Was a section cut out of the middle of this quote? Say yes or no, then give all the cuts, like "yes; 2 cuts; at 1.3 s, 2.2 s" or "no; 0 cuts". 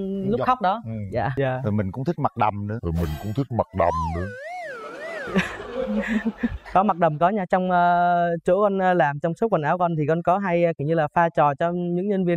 yes; 1 cut; at 1.3 s